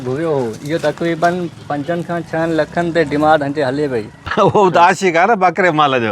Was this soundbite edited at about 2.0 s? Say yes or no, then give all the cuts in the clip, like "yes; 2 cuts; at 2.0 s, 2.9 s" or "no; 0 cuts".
no; 1 cut; at 4.2 s